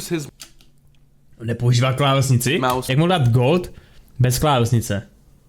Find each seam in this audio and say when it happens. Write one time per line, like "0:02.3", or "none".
0:02.9